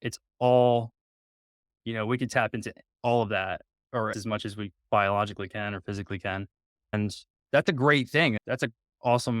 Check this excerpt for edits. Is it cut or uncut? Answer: cut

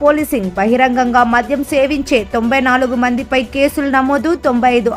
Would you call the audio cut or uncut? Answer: uncut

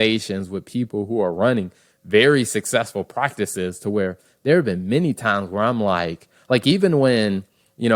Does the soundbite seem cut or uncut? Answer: uncut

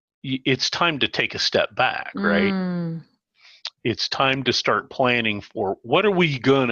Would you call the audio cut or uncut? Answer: uncut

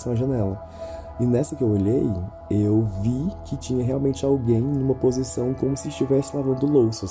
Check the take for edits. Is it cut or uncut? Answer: uncut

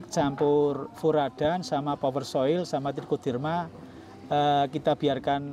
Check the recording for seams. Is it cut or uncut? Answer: uncut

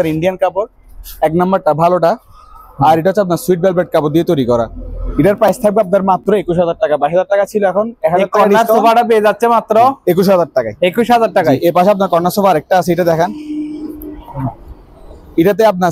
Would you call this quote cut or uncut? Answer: uncut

